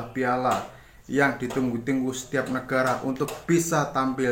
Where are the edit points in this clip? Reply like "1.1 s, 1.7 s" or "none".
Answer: none